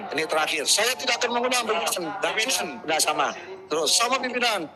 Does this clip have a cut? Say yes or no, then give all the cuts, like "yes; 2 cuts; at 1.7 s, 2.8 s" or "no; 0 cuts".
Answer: no; 0 cuts